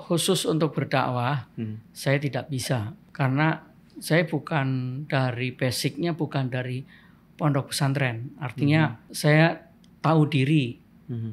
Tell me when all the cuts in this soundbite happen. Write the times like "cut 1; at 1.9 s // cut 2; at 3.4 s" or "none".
cut 1; at 3.0 s // cut 2; at 9.0 s